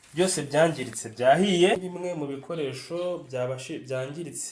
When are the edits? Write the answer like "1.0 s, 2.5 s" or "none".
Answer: 1.9 s